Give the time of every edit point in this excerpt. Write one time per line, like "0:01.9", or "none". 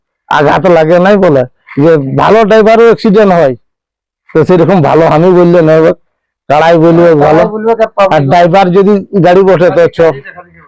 none

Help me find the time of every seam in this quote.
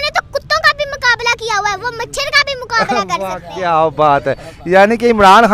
none

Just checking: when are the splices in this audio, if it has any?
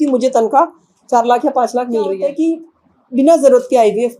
0:02.2

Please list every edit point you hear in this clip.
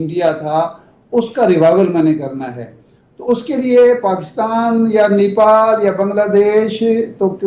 none

